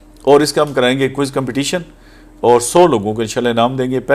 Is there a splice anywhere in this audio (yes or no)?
no